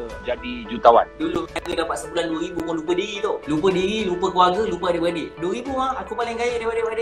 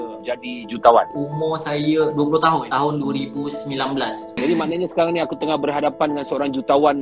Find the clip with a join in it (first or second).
second